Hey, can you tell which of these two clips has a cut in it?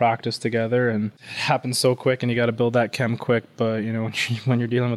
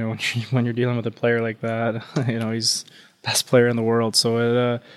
first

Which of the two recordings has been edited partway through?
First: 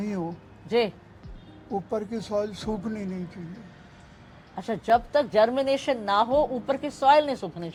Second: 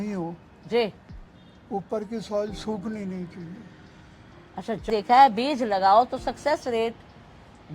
second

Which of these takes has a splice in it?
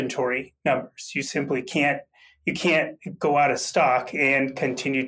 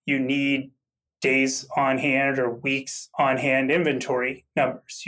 first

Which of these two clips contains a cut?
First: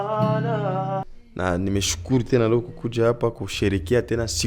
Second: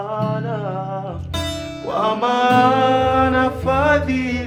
first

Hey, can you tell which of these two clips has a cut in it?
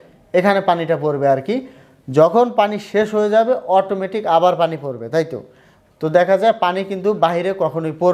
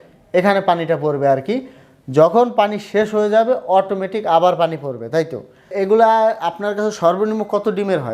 second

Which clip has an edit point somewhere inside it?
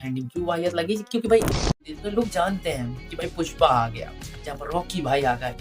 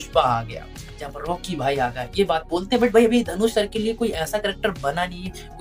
first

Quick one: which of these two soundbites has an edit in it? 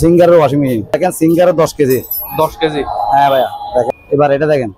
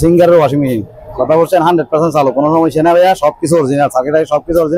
first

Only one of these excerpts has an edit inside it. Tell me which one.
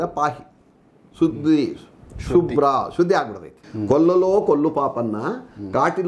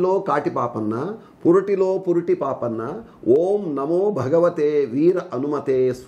first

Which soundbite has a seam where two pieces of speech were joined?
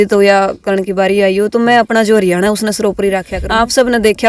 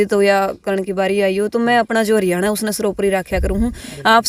first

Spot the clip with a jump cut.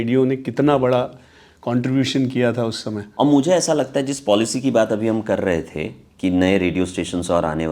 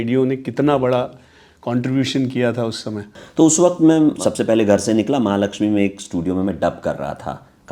second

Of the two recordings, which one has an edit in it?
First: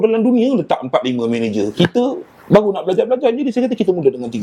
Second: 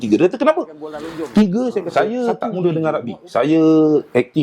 second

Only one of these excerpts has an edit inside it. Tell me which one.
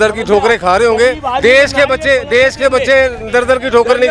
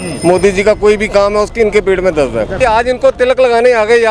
second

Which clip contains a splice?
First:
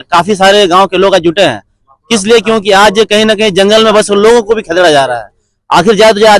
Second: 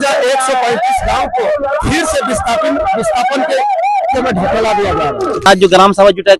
second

